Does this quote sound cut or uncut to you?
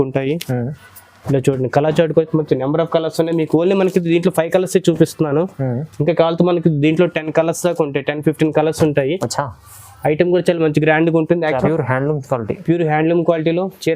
cut